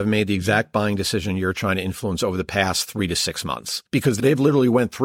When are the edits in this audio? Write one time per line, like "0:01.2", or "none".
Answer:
0:04.2